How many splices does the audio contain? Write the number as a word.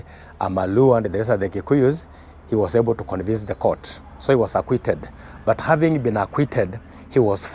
zero